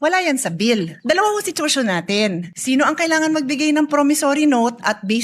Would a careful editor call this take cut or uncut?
cut